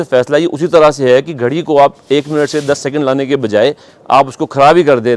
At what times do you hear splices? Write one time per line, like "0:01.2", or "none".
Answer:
none